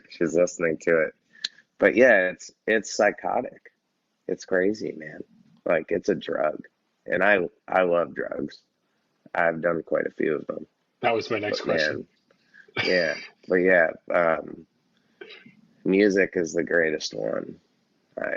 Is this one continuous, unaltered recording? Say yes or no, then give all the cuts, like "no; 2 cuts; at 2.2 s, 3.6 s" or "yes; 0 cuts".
yes; 0 cuts